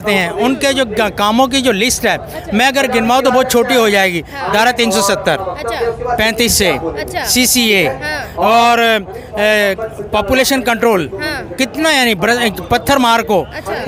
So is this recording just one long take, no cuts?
yes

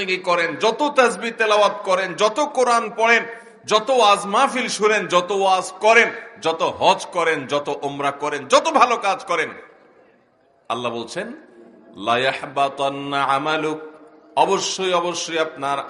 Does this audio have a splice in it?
no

